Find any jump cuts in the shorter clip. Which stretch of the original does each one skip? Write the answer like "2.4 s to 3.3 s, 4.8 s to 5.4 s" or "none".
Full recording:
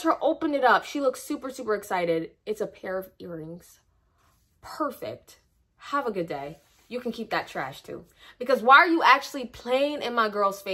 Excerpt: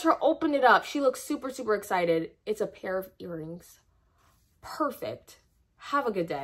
none